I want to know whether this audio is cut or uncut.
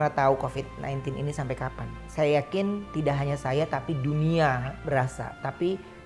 cut